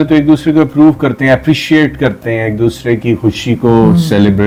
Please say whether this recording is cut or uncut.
uncut